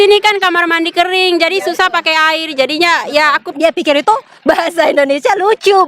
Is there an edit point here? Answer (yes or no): yes